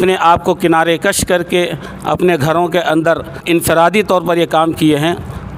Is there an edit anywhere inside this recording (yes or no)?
yes